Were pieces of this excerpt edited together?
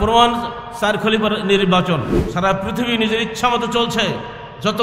yes; 1 cut; at 2.2 s

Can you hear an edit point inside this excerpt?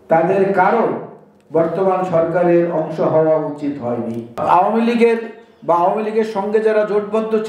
yes; 1 cut; at 4.3 s

